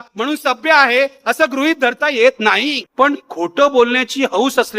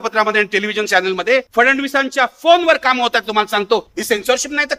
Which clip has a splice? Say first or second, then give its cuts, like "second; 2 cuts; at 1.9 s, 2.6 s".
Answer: first; 1 cut; at 2.9 s